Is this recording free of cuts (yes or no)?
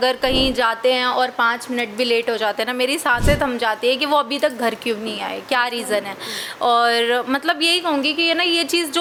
yes